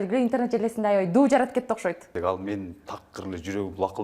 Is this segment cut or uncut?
cut